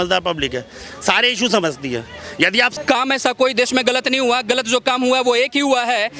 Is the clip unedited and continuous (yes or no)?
no